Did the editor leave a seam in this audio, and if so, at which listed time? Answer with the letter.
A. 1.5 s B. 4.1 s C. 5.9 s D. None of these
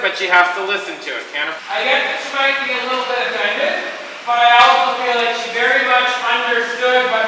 A